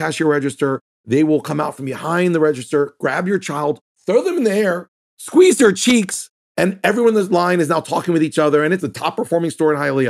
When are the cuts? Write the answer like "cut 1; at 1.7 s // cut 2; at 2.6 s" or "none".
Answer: cut 1; at 6.4 s // cut 2; at 8.8 s